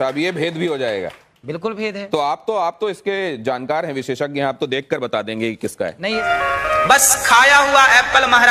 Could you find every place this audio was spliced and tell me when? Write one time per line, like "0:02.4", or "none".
0:06.2